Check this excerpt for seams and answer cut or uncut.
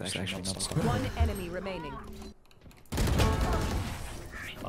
cut